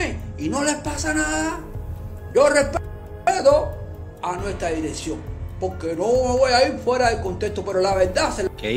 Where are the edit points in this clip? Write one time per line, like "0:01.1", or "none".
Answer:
none